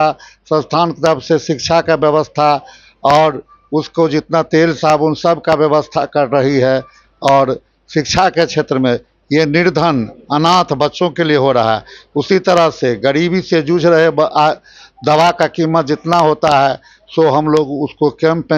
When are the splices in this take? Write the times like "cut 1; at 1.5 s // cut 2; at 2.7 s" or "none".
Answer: none